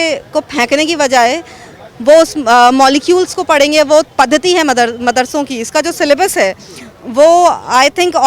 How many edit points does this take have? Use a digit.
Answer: 1